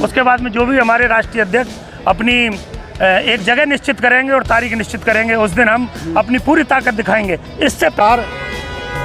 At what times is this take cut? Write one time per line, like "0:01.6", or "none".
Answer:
0:08.0

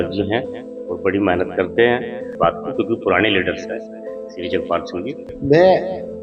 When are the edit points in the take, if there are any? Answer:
0:02.3
0:05.3

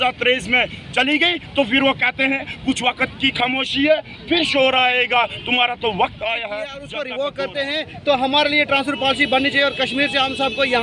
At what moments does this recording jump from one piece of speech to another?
0:06.8

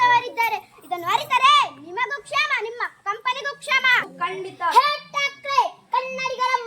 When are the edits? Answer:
0:04.0

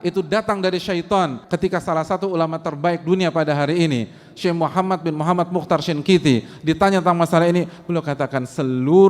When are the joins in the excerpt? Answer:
0:01.4

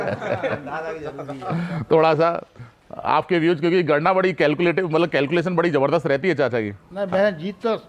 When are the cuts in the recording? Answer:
none

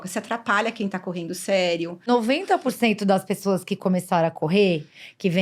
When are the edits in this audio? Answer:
0:02.1

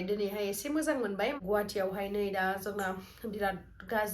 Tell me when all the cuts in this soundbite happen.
0:01.4

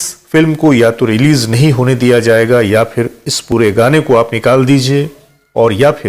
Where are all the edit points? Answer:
none

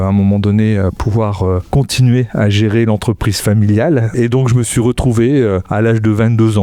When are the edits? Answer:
0:01.7
0:04.1
0:05.7

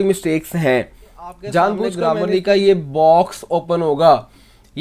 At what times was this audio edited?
0:01.9

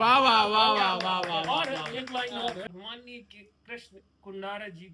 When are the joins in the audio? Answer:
0:02.6

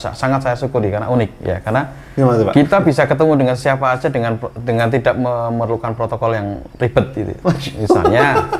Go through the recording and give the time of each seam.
none

